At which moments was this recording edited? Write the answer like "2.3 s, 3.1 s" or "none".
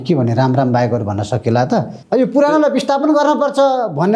2.0 s